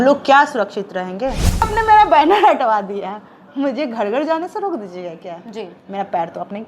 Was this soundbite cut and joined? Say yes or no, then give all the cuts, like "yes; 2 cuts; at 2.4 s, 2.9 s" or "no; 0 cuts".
yes; 1 cut; at 1.7 s